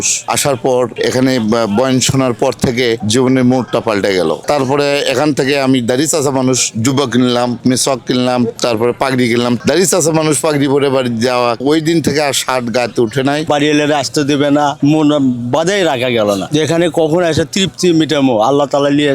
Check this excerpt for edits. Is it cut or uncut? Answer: cut